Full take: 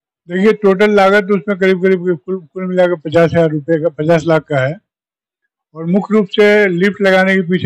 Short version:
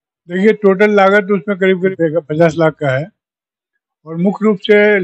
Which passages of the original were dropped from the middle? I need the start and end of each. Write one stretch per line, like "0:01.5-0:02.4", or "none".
0:01.9-0:03.6